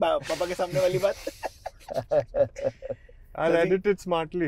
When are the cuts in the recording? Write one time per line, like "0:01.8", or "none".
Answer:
none